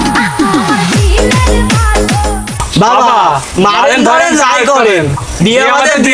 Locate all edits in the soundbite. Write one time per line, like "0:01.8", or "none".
none